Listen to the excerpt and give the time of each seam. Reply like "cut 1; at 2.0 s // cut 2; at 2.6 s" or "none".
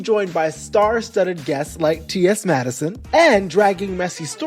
cut 1; at 2.9 s